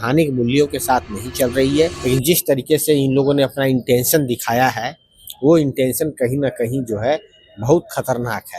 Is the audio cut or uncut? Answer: cut